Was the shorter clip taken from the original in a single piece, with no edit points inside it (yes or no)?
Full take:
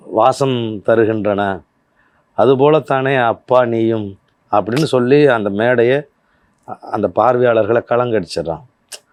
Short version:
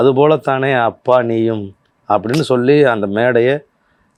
yes